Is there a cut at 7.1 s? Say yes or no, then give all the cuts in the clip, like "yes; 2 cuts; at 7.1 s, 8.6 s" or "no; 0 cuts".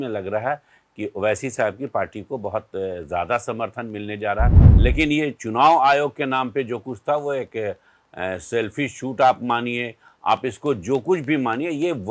no; 1 cut; at 4.6 s